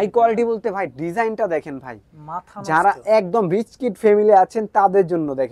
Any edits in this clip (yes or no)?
no